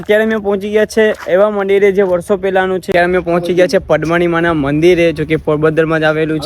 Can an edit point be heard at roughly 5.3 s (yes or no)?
no